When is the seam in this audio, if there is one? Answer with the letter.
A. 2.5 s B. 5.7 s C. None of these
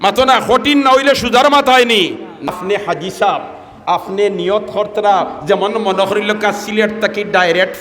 A